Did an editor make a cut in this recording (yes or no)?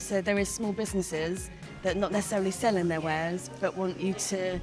no